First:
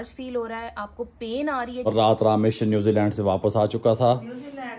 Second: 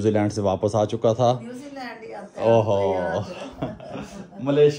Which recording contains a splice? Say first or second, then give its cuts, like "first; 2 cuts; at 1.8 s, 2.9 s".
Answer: first; 1 cut; at 1.9 s